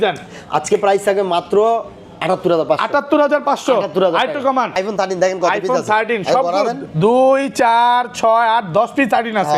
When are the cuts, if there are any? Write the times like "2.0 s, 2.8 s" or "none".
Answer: 4.7 s

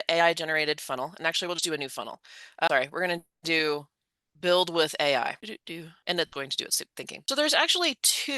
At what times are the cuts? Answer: 5.9 s, 7.2 s

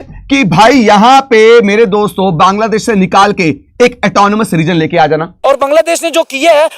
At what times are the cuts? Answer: 5.3 s

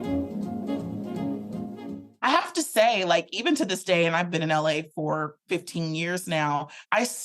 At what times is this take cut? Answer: 2.0 s

